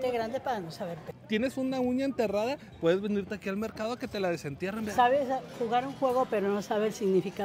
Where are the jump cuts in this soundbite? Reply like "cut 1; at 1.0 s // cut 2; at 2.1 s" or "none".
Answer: cut 1; at 1.1 s // cut 2; at 4.9 s